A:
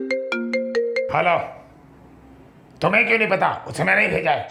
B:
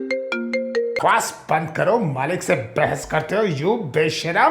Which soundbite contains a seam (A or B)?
B